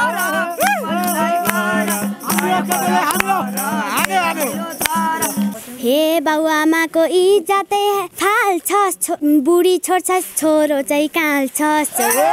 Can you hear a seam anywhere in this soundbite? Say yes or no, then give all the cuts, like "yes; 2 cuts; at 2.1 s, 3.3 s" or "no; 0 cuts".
yes; 3 cuts; at 5.5 s, 8.1 s, 9.2 s